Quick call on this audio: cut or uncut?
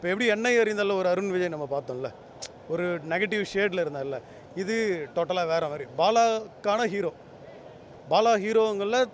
uncut